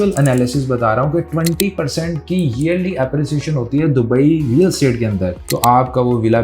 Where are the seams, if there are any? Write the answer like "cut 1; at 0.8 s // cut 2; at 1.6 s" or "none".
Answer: cut 1; at 5.4 s